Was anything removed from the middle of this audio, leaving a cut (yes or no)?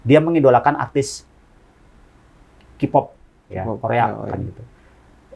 no